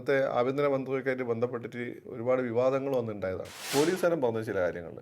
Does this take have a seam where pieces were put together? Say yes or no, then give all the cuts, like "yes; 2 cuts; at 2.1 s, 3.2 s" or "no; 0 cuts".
yes; 1 cut; at 3.7 s